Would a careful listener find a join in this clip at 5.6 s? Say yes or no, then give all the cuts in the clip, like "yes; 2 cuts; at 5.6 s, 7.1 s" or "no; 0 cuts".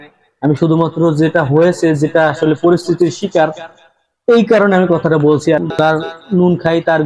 yes; 1 cut; at 5.6 s